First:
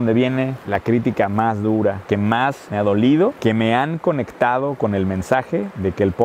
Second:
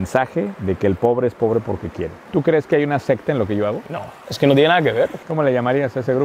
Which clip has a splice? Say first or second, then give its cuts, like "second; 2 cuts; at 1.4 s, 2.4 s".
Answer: second; 2 cuts; at 2.3 s, 5.2 s